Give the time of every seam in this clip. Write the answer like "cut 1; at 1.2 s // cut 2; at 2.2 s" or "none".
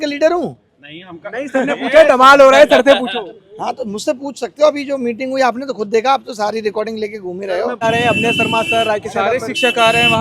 cut 1; at 7.8 s

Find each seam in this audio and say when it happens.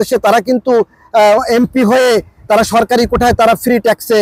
none

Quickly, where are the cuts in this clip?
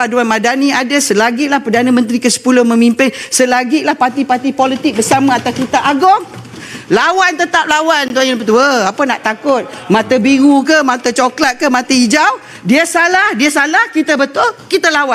none

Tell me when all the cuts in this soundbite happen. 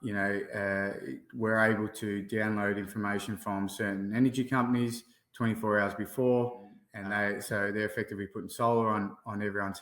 cut 1; at 6.9 s

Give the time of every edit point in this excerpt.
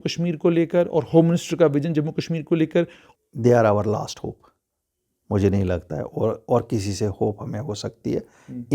cut 1; at 3.0 s

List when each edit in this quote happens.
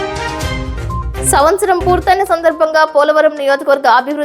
cut 1; at 1.2 s

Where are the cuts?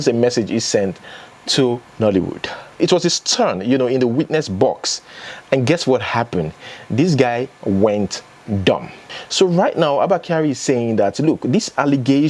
cut 1; at 2.8 s // cut 2; at 9.1 s

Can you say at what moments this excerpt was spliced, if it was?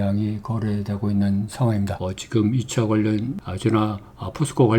cut 1; at 2.0 s // cut 2; at 3.4 s

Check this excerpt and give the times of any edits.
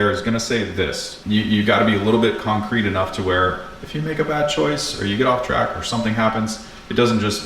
cut 1; at 1.1 s

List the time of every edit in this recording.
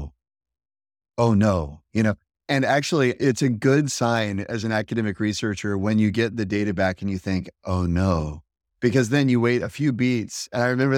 cut 1; at 3.2 s

